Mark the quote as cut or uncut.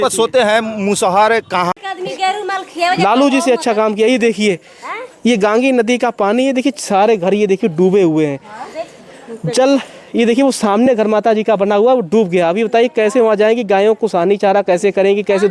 cut